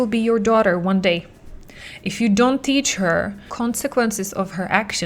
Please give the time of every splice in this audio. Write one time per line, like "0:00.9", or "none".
0:03.5